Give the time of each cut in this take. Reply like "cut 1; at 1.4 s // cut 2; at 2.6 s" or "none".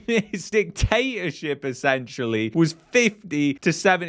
none